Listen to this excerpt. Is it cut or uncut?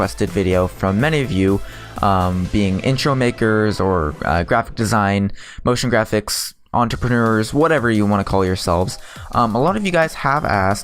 cut